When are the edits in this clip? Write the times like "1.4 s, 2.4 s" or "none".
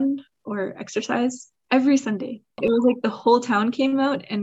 2.5 s